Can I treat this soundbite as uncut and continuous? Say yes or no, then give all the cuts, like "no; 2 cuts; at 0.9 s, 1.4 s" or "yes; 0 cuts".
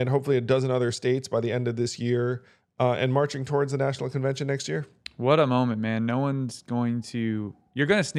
yes; 0 cuts